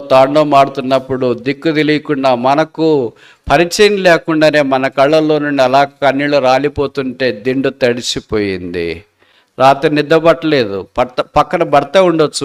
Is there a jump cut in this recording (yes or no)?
no